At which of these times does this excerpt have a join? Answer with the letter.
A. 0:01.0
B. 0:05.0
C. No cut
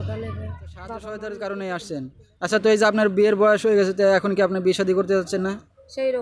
A